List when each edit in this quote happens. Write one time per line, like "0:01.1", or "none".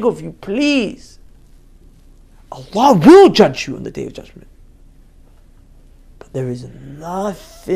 none